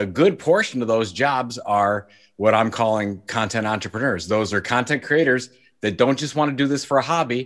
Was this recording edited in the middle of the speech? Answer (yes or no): no